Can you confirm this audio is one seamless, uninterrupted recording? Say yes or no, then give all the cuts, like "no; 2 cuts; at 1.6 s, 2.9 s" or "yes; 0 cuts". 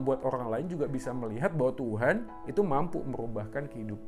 yes; 0 cuts